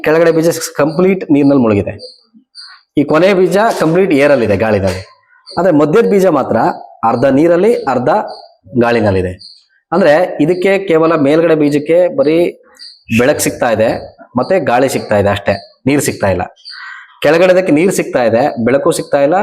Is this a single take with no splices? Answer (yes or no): yes